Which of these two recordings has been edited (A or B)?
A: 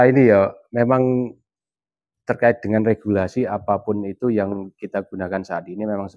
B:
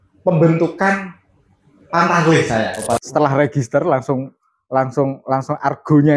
B